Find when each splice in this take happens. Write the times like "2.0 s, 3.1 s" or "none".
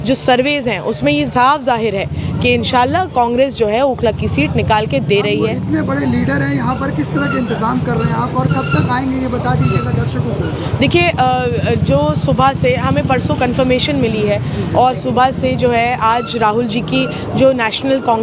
none